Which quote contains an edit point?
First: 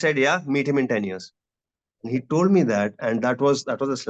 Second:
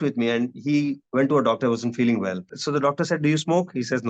second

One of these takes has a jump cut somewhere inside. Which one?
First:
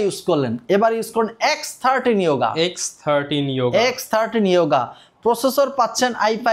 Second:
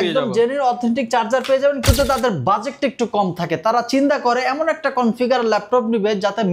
second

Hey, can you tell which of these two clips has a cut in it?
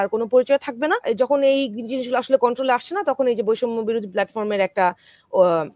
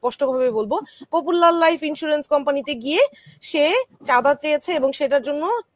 first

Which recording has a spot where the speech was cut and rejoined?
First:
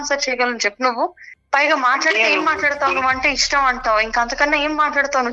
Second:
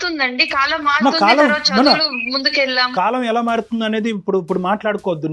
second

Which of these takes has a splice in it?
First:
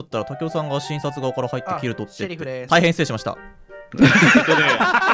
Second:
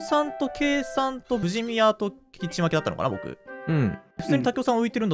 second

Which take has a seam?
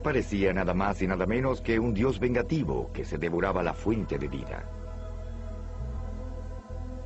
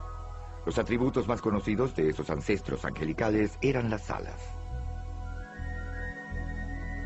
first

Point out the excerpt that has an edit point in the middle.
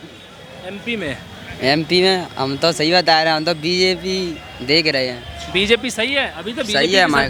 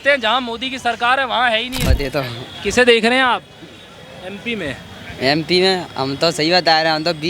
second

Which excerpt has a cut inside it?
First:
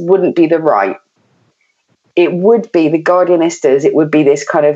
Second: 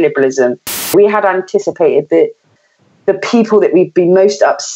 second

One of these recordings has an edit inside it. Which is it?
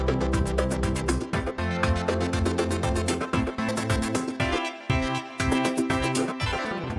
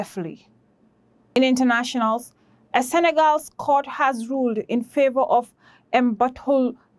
second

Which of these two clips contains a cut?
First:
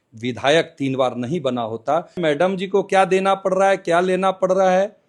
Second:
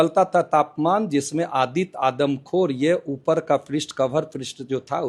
first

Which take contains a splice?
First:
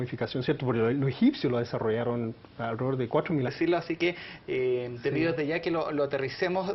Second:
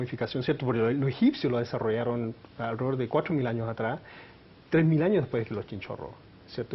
second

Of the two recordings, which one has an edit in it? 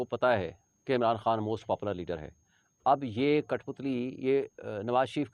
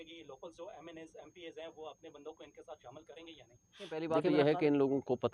second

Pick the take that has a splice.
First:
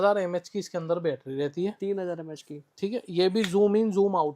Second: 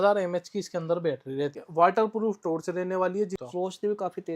second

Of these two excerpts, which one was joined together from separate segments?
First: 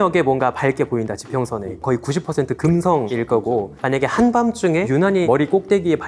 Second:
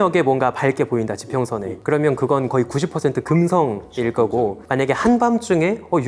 first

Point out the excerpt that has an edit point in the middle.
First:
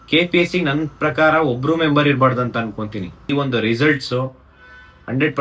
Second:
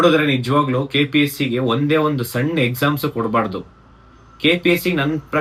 first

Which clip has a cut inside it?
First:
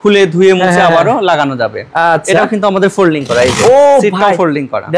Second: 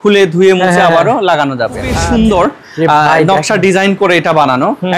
second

